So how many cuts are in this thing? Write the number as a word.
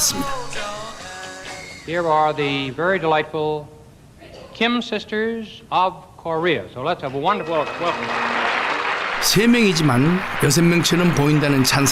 zero